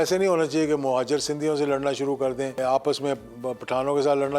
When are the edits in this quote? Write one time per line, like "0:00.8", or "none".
0:02.6